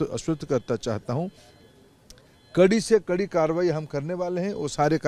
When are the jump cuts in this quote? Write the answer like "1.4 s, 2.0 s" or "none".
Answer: none